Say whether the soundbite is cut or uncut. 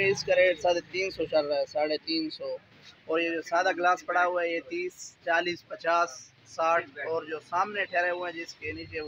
uncut